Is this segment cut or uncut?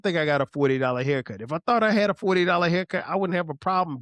uncut